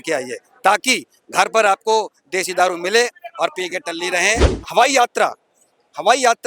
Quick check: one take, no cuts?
no; 1 cut; at 4.5 s

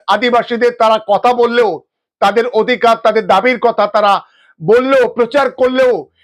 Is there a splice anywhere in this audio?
no; 0 cuts

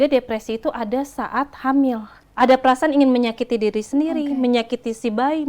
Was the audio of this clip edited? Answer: yes; 1 cut; at 2.1 s

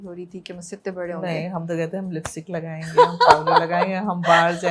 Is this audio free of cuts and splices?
yes; 0 cuts

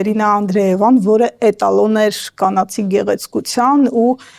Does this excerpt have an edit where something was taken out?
no; 0 cuts

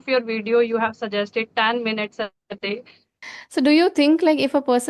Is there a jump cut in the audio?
yes; 1 cut; at 3.1 s

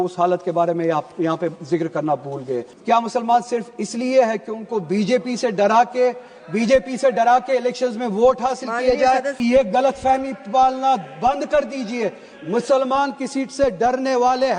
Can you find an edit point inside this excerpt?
yes; 2 cuts; at 2.7 s, 9.3 s

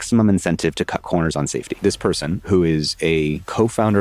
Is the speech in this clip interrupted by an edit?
yes; 1 cut; at 1.7 s

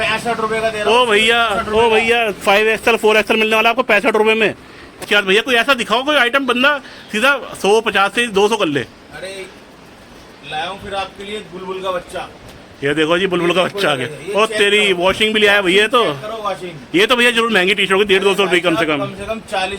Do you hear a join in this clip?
yes; 1 cut; at 4.9 s

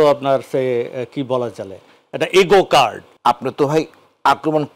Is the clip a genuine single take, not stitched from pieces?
no; 1 cut; at 3.1 s

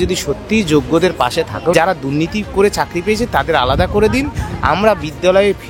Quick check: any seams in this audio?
yes; 1 cut; at 1.7 s

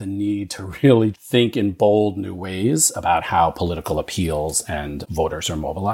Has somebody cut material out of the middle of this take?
no; 0 cuts

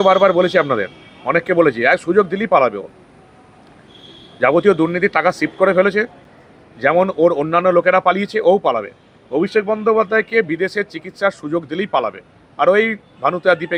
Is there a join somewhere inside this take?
no; 0 cuts

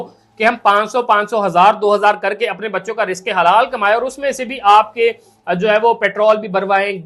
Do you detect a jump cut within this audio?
no; 0 cuts

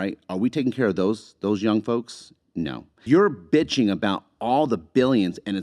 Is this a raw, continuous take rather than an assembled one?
no; 1 cut; at 2.9 s

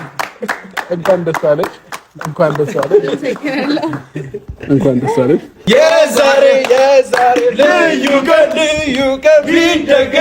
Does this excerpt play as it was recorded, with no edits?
no; 1 cut; at 5.5 s

